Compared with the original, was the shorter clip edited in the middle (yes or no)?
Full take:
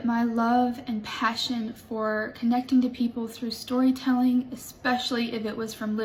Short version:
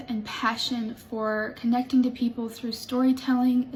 no